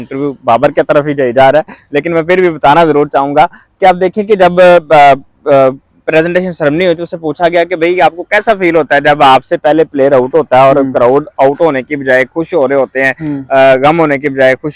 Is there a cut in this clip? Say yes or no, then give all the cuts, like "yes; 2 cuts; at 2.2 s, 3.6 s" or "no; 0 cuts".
no; 0 cuts